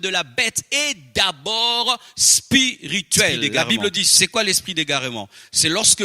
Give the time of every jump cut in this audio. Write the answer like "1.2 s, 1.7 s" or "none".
4.0 s